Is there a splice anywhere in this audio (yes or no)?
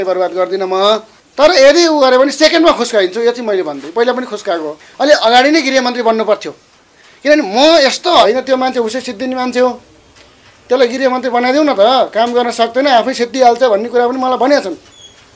yes